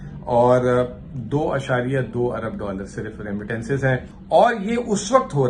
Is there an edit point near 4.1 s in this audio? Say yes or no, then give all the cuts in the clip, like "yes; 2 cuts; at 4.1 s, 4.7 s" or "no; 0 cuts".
yes; 1 cut; at 4.1 s